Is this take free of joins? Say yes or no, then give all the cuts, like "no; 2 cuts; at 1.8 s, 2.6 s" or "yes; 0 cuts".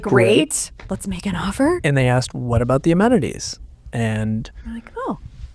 yes; 0 cuts